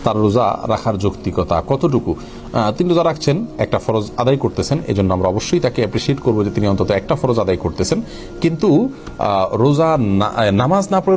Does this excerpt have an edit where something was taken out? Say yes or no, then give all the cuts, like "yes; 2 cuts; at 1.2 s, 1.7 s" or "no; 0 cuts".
no; 0 cuts